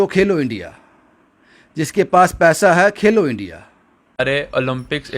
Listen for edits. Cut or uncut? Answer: cut